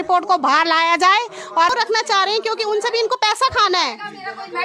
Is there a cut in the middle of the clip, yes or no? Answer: yes